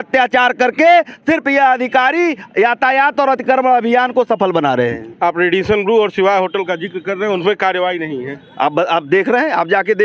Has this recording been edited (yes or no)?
no